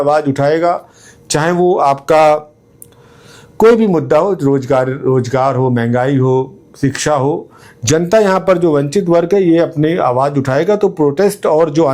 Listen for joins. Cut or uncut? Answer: uncut